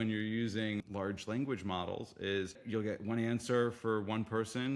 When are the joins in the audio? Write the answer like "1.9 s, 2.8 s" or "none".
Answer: 0.8 s, 2.6 s